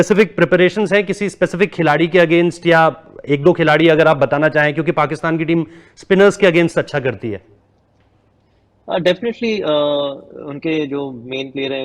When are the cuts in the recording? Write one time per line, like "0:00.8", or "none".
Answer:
none